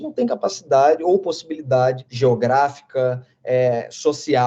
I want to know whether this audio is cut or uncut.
cut